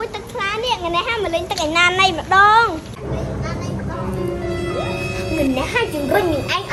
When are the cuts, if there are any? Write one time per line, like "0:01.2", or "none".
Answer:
none